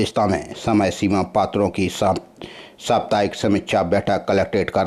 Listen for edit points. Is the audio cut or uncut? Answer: uncut